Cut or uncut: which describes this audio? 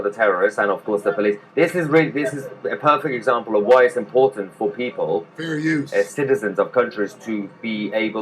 cut